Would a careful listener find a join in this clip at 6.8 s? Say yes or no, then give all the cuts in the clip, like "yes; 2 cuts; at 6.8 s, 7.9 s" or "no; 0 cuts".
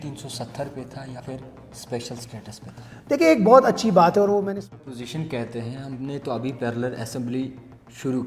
no; 2 cuts; at 1.2 s, 4.6 s